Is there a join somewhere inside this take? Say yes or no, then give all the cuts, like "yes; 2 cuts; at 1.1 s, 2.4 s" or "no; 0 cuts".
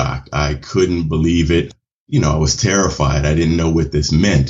yes; 1 cut; at 1.7 s